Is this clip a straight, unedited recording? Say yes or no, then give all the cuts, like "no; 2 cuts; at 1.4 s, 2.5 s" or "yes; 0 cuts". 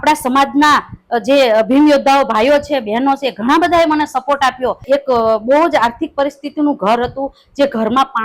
no; 1 cut; at 4.8 s